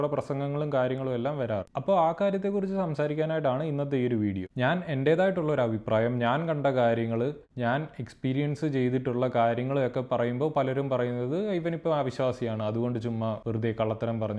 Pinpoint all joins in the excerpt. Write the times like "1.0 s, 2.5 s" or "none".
none